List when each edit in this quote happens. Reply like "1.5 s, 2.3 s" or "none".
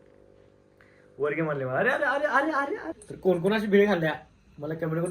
2.9 s